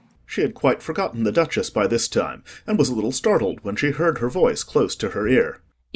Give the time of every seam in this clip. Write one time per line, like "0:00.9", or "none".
none